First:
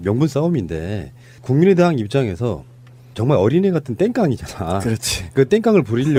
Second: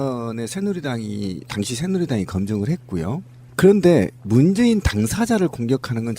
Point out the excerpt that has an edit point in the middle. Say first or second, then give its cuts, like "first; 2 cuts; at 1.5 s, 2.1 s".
second; 1 cut; at 4.2 s